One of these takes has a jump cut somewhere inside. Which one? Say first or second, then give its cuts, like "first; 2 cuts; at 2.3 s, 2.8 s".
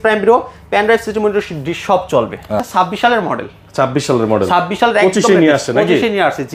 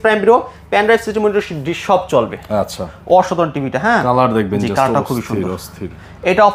first; 1 cut; at 2.7 s